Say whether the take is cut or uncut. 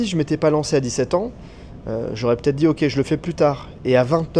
uncut